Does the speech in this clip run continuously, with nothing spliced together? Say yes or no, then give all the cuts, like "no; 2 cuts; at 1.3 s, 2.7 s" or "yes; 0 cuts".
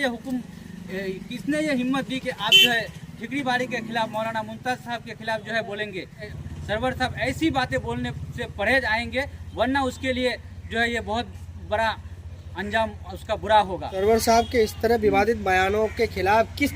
no; 1 cut; at 6.3 s